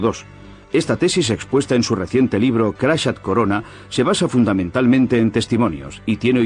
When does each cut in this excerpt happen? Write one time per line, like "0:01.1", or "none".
none